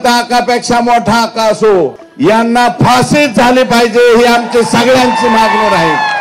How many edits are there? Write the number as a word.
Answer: one